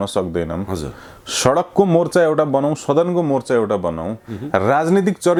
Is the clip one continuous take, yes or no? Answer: yes